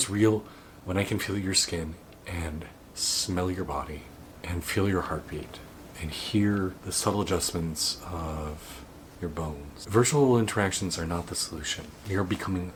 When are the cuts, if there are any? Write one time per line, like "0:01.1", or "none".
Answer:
none

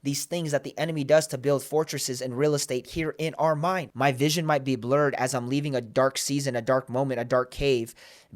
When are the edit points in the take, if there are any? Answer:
0:03.9

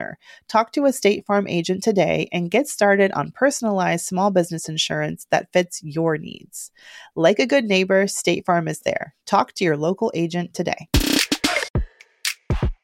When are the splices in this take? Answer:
0:11.8

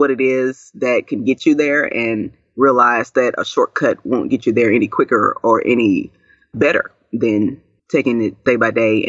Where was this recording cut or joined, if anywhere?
0:08.1

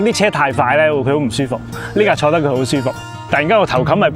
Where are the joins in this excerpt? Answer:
0:03.1

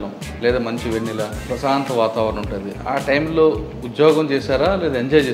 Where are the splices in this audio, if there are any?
0:01.4

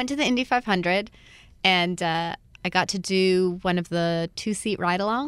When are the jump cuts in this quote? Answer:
none

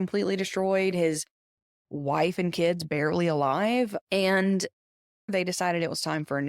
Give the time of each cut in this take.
0:05.3

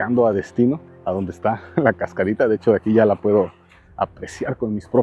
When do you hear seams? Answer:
0:00.9

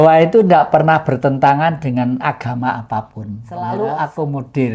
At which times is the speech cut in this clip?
0:03.5

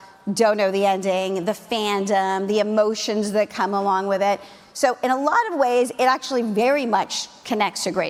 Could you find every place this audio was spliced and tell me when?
none

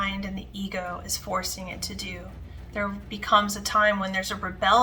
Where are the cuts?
none

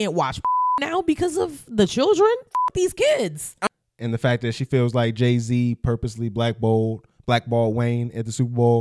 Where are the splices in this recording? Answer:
0:03.5

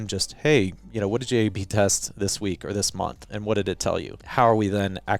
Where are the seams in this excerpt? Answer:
0:04.2

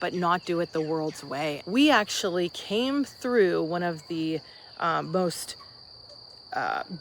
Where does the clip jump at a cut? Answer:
0:01.6

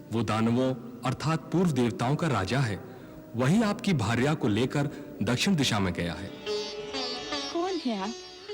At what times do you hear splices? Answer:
0:06.4

